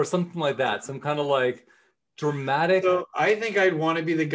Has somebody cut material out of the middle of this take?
no; 0 cuts

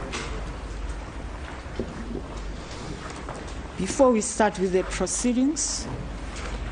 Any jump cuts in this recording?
no; 0 cuts

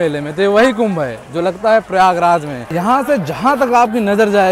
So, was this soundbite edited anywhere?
yes; 1 cut; at 2.6 s

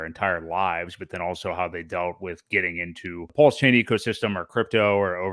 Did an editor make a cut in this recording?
yes; 1 cut; at 3.3 s

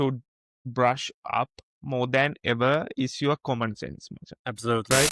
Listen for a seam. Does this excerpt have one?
no; 0 cuts

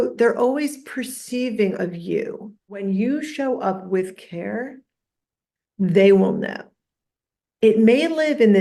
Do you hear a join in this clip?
yes; 1 cut; at 2.8 s

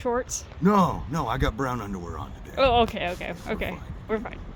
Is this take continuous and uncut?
yes; 0 cuts

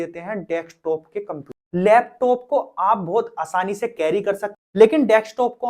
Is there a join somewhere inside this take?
yes; 2 cuts; at 1.6 s, 4.6 s

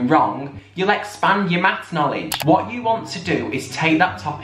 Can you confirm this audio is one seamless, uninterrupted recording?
no; 1 cut; at 2.3 s

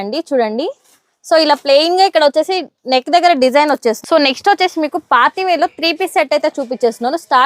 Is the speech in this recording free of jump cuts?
no; 1 cut; at 4.0 s

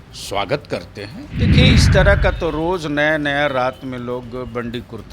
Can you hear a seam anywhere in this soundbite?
yes; 1 cut; at 1.5 s

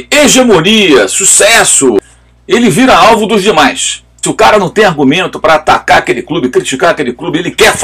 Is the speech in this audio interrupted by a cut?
yes; 2 cuts; at 2.0 s, 4.2 s

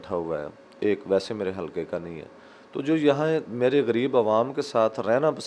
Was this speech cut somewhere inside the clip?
no; 0 cuts

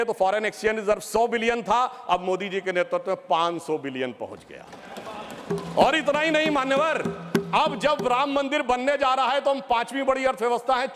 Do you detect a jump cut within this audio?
no; 0 cuts

